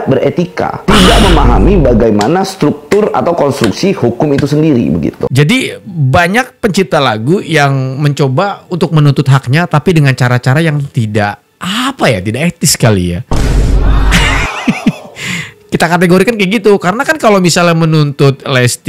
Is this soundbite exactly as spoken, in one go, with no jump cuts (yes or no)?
yes